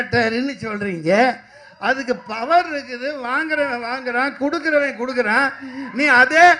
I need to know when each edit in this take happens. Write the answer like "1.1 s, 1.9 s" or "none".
none